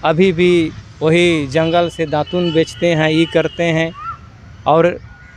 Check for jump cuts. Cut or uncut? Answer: uncut